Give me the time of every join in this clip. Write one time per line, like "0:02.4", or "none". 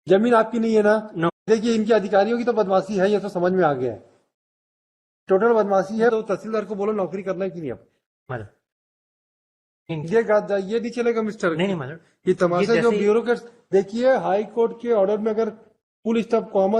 0:01.4
0:06.1